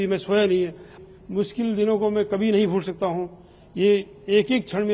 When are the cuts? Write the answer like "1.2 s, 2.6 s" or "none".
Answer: 1.0 s